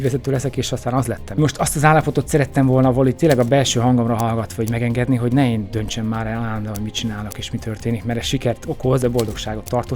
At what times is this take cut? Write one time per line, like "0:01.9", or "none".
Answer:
0:01.4
0:09.0